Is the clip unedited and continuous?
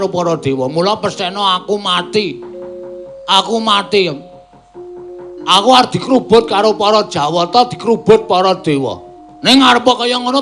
no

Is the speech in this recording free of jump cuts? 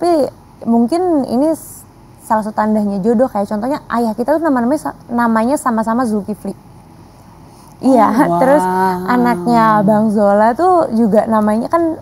yes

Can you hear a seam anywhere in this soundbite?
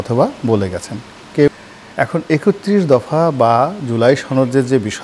yes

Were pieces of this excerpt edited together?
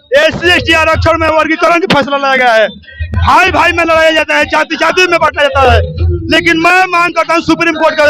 no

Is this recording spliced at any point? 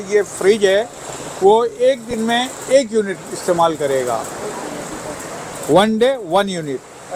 no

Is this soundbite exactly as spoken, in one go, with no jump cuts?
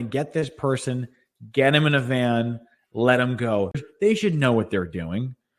no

